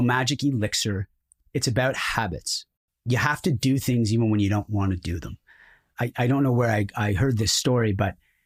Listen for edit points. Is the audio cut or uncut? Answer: uncut